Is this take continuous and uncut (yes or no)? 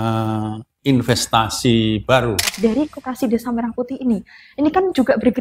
no